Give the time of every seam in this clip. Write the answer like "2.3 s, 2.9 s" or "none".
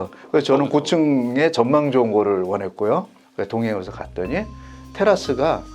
3.2 s